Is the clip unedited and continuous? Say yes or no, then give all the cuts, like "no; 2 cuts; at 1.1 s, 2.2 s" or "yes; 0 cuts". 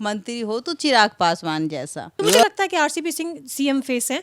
no; 1 cut; at 2.0 s